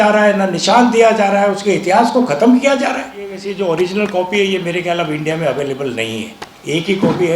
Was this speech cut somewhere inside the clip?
yes; 1 cut; at 3.4 s

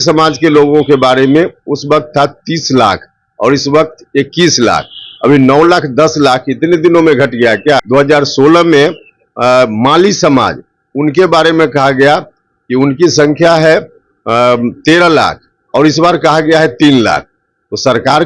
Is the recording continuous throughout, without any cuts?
no; 1 cut; at 7.8 s

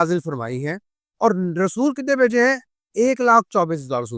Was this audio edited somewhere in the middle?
no; 0 cuts

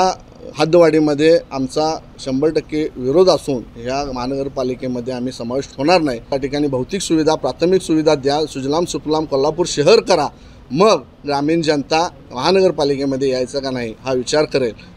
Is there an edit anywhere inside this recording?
yes; 1 cut; at 6.3 s

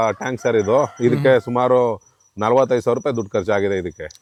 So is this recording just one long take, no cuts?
yes; 0 cuts

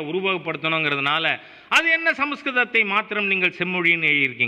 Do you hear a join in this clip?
no; 0 cuts

